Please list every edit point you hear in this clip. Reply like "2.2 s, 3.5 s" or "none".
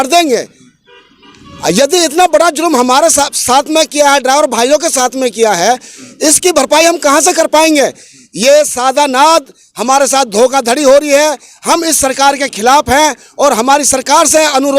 none